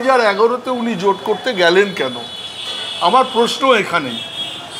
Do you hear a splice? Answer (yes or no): no